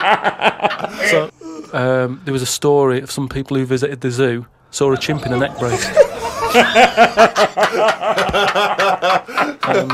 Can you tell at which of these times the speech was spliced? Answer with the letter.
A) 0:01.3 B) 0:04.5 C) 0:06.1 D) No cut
A